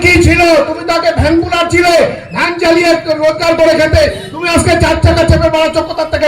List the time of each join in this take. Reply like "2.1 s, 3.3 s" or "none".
none